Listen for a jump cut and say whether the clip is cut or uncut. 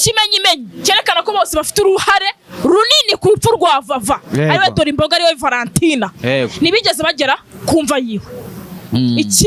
uncut